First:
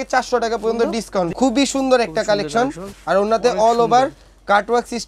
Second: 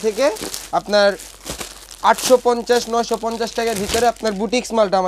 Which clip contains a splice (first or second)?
first